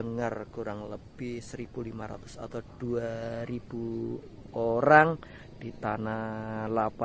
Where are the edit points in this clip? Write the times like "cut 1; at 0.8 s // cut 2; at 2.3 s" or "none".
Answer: none